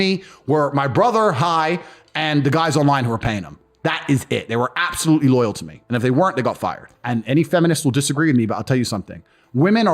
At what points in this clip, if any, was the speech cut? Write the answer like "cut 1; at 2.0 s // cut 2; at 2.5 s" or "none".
cut 1; at 6.9 s